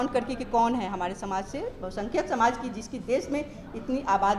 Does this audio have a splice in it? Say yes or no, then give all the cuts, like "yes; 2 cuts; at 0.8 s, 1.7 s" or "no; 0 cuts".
no; 0 cuts